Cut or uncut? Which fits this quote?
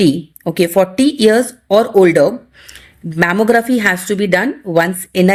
uncut